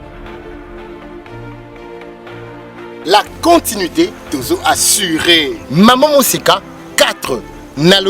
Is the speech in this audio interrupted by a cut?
yes; 1 cut; at 2.3 s

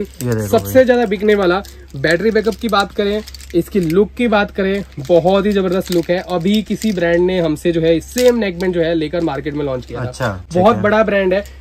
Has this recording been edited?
no; 0 cuts

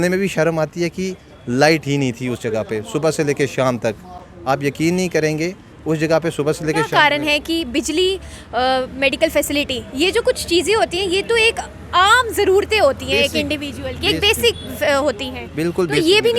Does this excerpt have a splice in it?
no; 0 cuts

